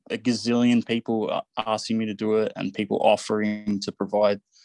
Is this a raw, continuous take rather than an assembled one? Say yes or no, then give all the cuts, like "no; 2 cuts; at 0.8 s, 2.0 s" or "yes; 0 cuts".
yes; 0 cuts